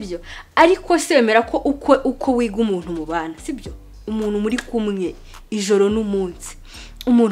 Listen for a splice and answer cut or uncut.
uncut